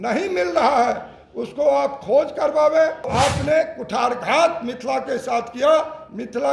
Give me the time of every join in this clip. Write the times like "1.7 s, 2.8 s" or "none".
3.1 s